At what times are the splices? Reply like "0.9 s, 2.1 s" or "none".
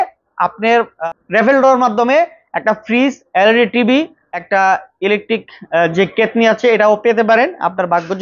0.9 s, 4.6 s